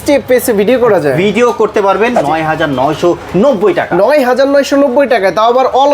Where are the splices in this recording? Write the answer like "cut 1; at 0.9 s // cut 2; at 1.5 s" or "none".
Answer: cut 1; at 2.2 s